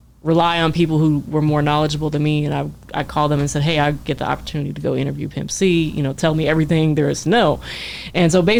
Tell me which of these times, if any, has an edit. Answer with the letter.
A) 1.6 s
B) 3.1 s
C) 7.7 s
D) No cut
D